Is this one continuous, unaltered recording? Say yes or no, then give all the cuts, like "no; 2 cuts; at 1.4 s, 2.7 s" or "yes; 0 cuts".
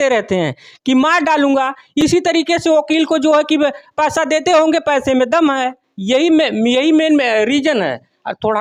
yes; 0 cuts